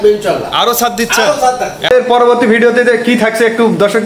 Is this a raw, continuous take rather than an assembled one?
no; 1 cut; at 1.9 s

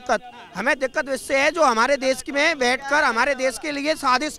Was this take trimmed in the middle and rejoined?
no; 0 cuts

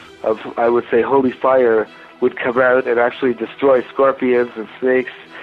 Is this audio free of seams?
no; 1 cut; at 2.0 s

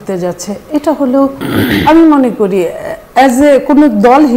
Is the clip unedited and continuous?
yes; 0 cuts

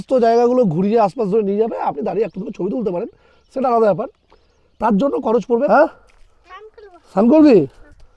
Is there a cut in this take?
yes; 1 cut; at 5.7 s

